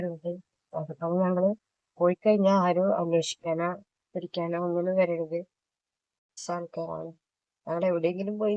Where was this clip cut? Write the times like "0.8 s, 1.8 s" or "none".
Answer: 6.4 s